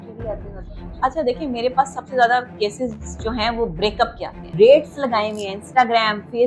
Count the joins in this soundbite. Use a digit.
1